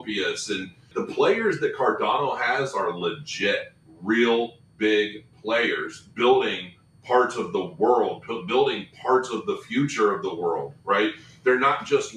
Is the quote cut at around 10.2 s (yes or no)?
no